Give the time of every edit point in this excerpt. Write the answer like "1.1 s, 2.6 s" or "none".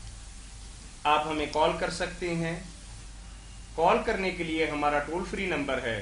1.3 s